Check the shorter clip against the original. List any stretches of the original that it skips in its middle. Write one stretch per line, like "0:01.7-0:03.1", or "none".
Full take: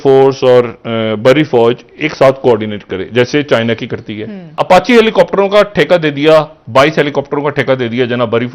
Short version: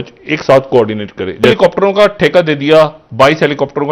0:03.2-0:05.1